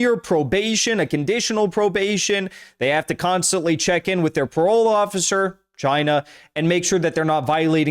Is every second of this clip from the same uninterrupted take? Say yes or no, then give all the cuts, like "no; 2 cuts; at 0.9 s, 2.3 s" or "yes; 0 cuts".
yes; 0 cuts